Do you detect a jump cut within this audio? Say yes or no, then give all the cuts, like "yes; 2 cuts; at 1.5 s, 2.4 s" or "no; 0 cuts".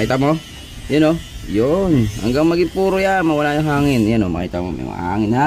no; 0 cuts